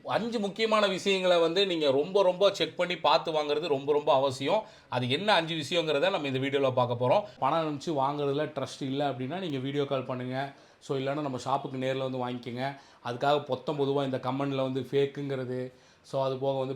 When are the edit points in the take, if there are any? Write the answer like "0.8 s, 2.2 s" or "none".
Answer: 7.3 s